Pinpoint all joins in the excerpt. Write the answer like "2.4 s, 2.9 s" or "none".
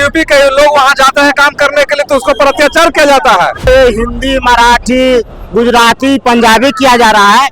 3.7 s